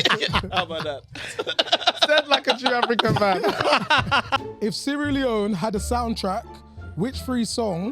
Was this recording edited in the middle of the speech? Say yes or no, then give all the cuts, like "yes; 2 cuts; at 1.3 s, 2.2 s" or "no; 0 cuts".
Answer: yes; 1 cut; at 4.4 s